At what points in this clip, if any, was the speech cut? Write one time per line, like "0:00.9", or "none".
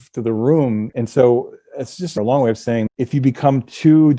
0:00.9
0:02.1
0:02.9